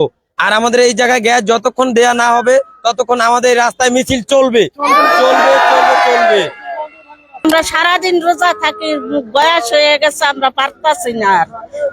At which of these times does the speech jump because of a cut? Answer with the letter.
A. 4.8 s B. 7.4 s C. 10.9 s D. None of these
B